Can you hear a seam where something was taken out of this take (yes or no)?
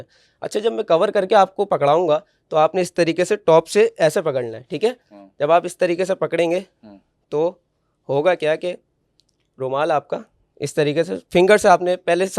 no